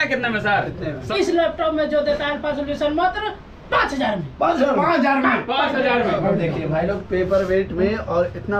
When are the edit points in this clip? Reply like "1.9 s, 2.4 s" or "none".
1.1 s, 6.2 s